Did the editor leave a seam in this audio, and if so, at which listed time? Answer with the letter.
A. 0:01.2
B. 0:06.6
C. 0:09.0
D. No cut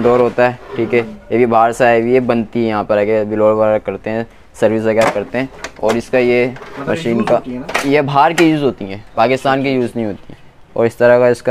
D